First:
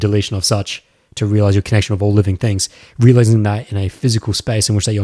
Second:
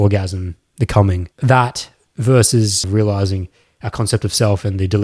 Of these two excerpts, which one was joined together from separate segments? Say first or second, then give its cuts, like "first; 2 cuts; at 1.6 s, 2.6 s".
second; 2 cuts; at 1.3 s, 2.9 s